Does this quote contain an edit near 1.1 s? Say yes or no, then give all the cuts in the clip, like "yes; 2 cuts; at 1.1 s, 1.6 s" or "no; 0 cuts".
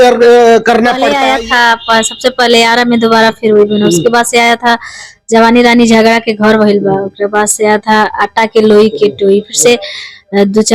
yes; 1 cut; at 1.1 s